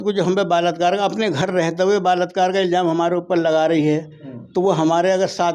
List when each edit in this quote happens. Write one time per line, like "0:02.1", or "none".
none